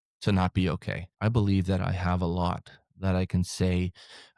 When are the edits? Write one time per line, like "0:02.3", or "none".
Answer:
0:01.0